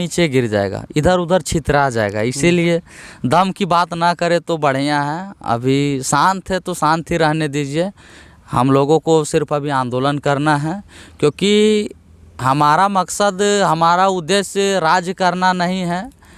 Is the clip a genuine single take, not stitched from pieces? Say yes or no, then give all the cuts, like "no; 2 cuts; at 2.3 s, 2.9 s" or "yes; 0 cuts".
yes; 0 cuts